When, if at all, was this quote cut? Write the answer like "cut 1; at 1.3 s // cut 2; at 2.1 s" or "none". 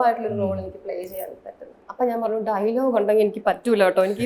cut 1; at 1.8 s